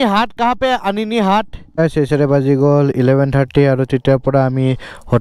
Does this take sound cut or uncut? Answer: cut